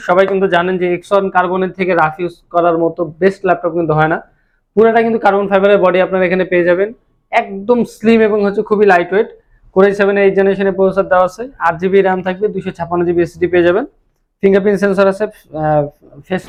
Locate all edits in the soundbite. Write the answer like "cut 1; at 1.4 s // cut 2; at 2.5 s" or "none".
none